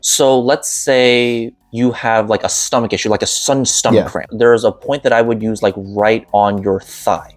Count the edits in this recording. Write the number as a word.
three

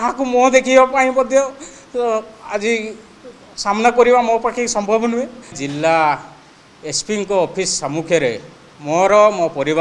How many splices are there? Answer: one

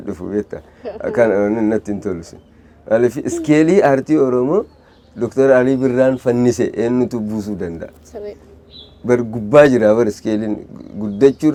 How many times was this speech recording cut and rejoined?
zero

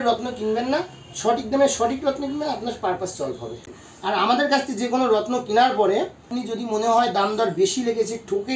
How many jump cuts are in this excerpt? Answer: two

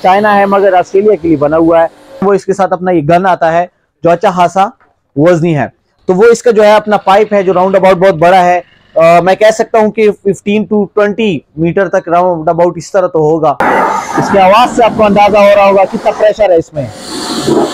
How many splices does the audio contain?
three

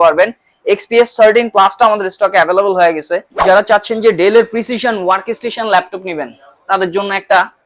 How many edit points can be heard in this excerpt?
one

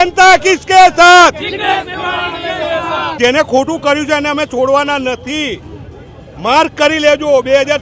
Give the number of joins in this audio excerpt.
one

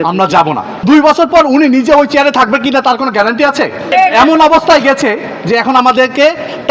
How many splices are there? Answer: two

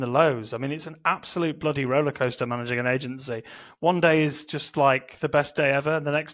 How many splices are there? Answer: zero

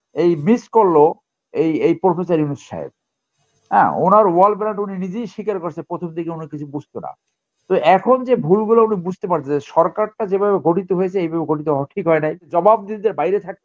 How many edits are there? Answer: one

